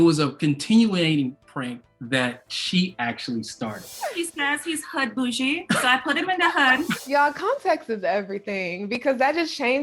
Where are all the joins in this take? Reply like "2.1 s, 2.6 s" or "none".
3.9 s, 7.0 s